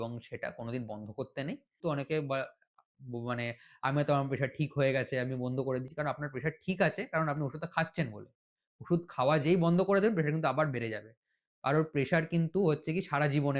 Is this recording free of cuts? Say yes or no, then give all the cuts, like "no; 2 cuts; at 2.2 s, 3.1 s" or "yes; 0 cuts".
no; 1 cut; at 1.8 s